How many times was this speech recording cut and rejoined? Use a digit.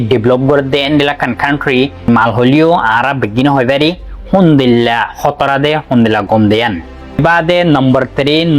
2